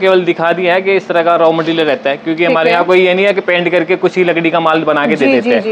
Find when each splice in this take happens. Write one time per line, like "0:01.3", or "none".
none